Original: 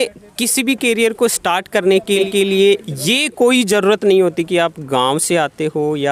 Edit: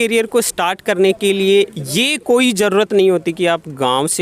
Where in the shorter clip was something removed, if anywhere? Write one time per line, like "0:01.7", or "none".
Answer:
0:01.2